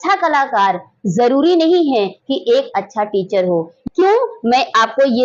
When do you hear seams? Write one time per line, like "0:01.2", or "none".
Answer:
0:03.7